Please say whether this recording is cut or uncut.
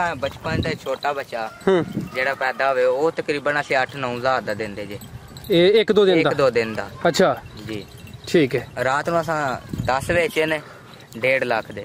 uncut